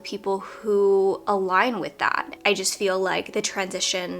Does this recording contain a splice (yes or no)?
yes